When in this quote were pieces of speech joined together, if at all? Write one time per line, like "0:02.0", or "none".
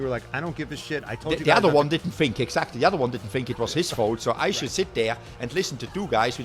none